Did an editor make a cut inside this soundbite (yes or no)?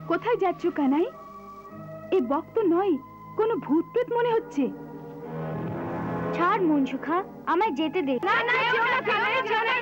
yes